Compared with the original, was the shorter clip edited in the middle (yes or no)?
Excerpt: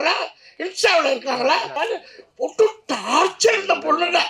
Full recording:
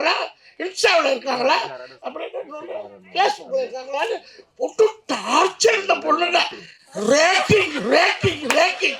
yes